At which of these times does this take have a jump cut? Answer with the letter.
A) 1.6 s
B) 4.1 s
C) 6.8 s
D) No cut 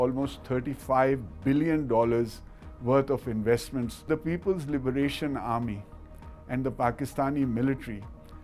B